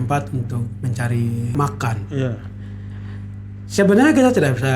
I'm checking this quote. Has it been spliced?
yes; 1 cut; at 1.5 s

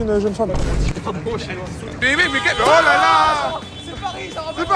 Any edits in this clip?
yes; 1 cut; at 2.0 s

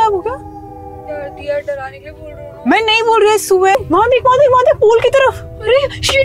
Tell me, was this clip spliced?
yes; 1 cut; at 3.8 s

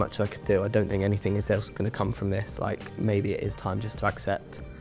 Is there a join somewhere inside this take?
no; 0 cuts

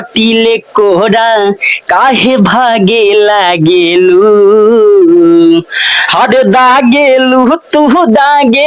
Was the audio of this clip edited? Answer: no; 0 cuts

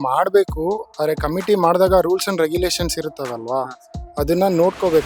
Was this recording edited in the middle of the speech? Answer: no; 0 cuts

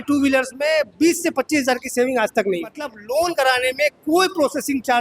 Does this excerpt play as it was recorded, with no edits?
no; 1 cut; at 2.9 s

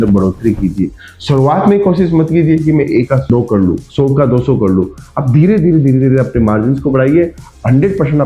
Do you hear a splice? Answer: no; 0 cuts

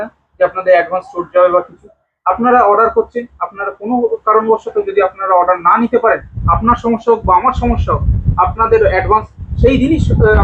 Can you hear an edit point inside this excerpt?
no; 0 cuts

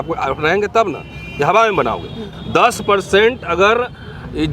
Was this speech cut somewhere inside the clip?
no; 0 cuts

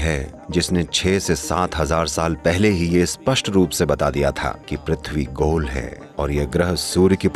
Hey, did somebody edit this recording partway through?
no; 0 cuts

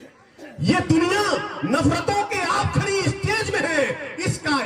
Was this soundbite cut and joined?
no; 0 cuts

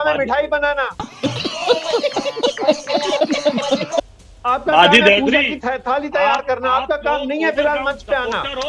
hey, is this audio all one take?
yes; 0 cuts

